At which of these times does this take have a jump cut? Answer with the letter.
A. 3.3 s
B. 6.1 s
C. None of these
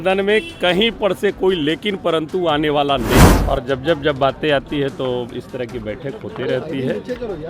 A